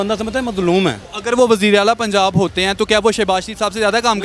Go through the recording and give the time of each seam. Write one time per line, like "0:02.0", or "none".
0:01.1